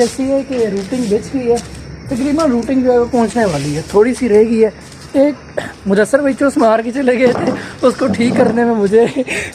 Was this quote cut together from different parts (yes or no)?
no